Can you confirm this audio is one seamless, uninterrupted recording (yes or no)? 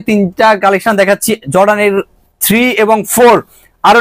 yes